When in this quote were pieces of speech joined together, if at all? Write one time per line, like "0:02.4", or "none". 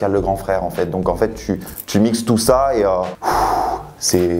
0:03.1